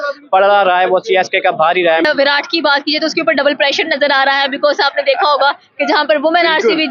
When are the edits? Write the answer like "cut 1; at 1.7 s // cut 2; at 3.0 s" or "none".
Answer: cut 1; at 2.0 s